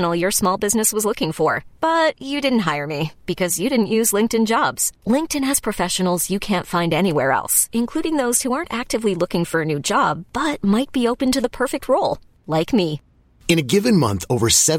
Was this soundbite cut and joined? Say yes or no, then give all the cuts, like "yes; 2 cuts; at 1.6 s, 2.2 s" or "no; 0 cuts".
no; 0 cuts